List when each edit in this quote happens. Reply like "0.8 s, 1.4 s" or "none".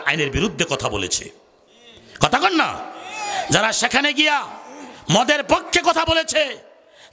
none